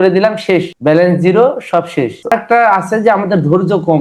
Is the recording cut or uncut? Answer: cut